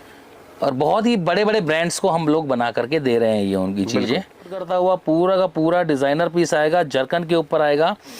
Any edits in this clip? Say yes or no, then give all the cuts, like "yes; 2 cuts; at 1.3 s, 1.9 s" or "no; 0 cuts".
yes; 1 cut; at 4.6 s